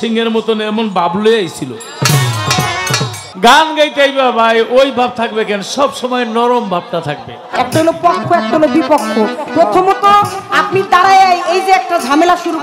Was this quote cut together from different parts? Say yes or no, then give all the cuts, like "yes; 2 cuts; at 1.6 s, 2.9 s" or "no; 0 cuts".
yes; 2 cuts; at 3.2 s, 7.4 s